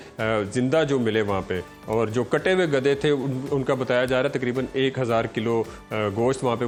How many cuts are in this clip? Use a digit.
0